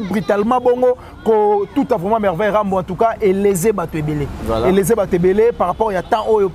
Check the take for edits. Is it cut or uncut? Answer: uncut